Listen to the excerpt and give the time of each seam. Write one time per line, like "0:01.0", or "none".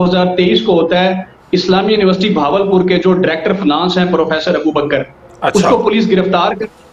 none